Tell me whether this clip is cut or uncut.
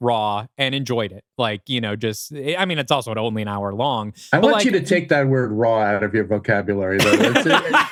uncut